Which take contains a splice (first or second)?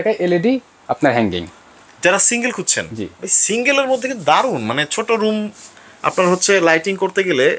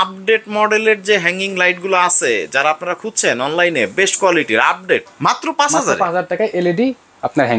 second